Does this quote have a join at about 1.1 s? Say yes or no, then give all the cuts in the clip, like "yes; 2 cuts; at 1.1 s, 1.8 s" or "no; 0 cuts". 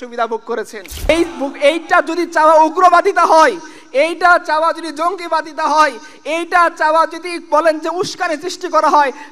yes; 1 cut; at 1.1 s